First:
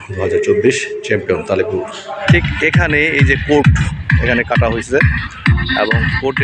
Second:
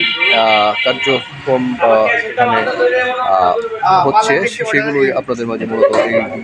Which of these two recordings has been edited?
first; 1 cut; at 2.2 s

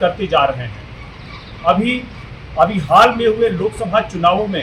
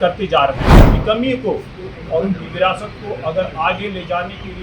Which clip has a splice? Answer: second; 1 cut; at 0.9 s

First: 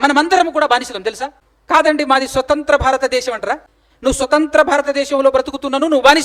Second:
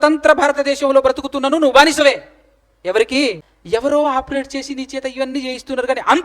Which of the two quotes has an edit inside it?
second; 1 cut; at 3.5 s

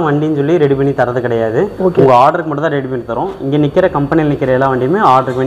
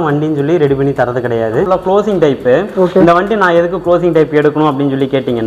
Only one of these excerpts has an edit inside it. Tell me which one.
second; 1 cut; at 1.7 s

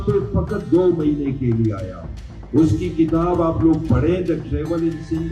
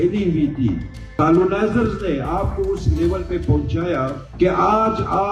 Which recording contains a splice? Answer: second; 2 cuts; at 1.0 s, 4.2 s

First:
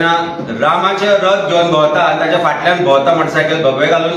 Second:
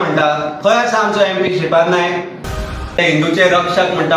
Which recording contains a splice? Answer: second; 1 cut; at 2.7 s

